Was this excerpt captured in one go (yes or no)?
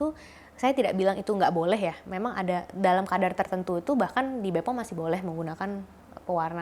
yes